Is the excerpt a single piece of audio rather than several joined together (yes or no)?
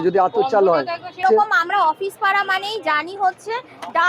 no